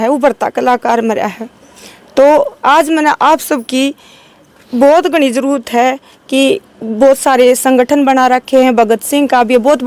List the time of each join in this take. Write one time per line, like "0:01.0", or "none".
none